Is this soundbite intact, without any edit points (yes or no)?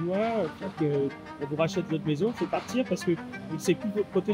yes